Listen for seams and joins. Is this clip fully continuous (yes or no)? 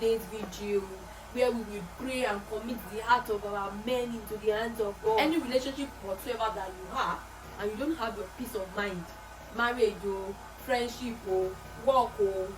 no